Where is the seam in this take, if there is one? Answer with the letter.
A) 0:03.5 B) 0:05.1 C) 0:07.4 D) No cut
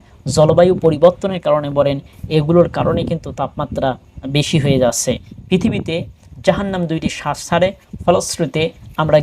B